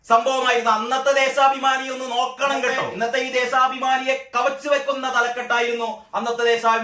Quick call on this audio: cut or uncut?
cut